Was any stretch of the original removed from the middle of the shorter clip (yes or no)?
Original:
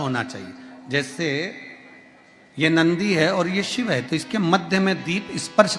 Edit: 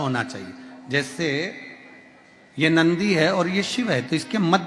no